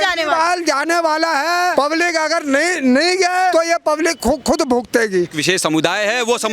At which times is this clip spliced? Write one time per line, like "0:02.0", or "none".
0:01.7
0:03.5
0:05.4